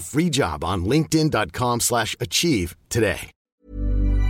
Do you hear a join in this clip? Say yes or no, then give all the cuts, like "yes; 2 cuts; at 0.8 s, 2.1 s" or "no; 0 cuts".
yes; 1 cut; at 3.3 s